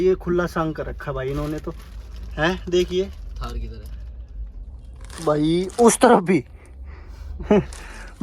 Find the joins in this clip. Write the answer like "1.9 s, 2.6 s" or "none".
none